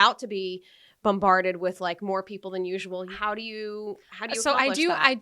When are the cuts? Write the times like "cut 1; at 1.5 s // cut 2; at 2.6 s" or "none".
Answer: cut 1; at 3.1 s